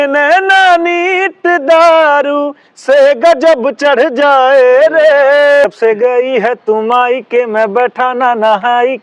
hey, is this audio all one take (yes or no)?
no